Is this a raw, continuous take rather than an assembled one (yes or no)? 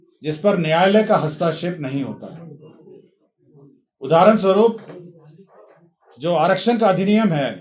yes